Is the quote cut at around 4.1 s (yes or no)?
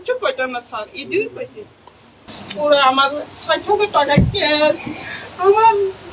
no